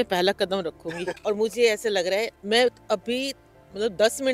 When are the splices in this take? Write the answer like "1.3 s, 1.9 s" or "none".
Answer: 1.1 s